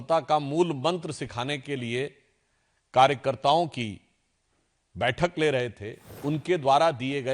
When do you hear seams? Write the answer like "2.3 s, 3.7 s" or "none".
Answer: 6.1 s